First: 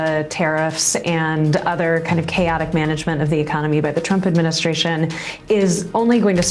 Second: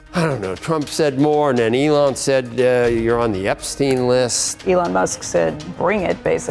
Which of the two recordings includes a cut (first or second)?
second